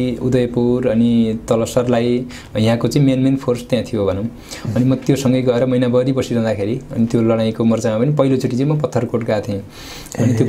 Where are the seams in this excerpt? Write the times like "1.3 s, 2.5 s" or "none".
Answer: none